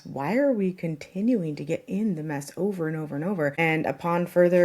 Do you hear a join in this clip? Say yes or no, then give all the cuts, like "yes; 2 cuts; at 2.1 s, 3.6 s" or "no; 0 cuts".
yes; 1 cut; at 3.5 s